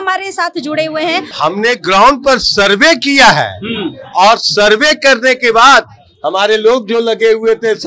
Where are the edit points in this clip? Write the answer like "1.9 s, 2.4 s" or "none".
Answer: 1.3 s